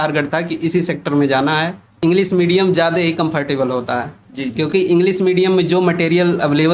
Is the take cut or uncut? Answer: cut